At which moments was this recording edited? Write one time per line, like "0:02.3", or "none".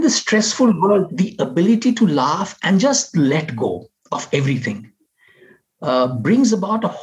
none

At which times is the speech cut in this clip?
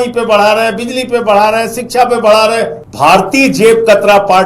0:02.8

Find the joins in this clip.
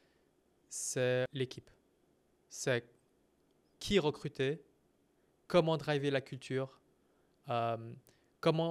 0:01.3
0:03.7

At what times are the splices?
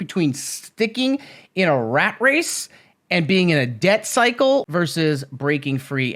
0:04.7

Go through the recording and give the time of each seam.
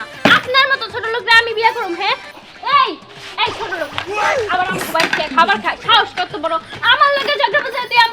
0:02.3

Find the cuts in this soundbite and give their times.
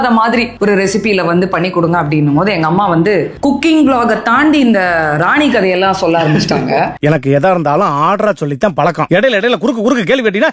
none

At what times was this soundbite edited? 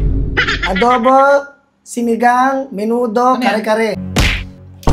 0:04.0

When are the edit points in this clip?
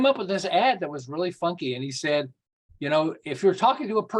none

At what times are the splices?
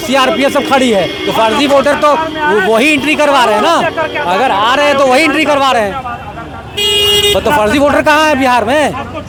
none

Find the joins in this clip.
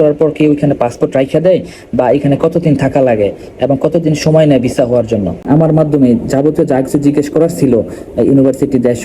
0:05.4

